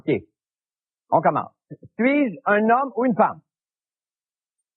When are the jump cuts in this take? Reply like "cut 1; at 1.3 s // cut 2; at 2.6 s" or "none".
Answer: cut 1; at 2.3 s